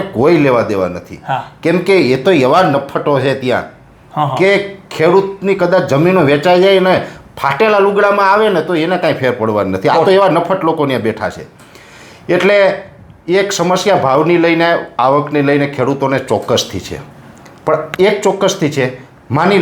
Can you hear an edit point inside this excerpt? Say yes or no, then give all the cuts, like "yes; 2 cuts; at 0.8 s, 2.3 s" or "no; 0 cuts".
no; 0 cuts